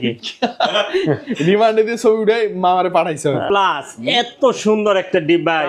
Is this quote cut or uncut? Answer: cut